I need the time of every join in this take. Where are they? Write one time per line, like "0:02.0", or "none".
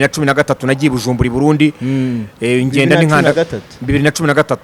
none